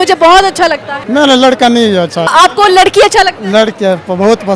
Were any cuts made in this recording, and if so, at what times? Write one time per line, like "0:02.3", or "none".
0:00.9
0:02.3